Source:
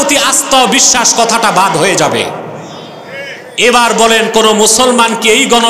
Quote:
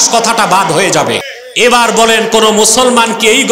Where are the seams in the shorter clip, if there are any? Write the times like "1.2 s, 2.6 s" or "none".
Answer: 1.4 s